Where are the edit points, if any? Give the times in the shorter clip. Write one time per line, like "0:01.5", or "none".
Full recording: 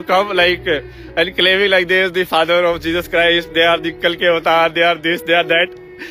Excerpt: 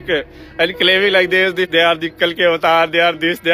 0:01.7